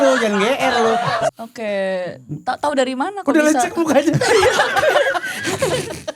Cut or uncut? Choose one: cut